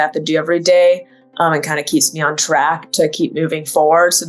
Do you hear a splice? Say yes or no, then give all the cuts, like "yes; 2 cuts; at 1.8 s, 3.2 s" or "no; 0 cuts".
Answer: no; 0 cuts